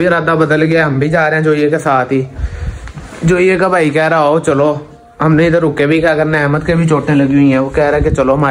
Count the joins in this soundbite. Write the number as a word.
zero